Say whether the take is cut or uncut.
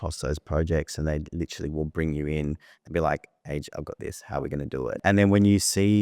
cut